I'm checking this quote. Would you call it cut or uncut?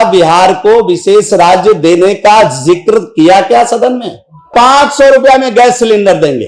cut